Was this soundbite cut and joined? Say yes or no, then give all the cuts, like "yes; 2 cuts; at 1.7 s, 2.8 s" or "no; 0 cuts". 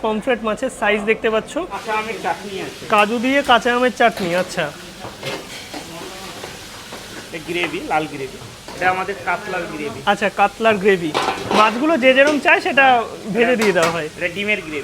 yes; 1 cut; at 1.8 s